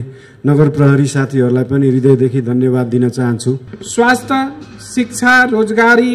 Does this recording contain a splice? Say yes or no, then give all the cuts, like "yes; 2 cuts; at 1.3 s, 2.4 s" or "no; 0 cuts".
yes; 1 cut; at 3.7 s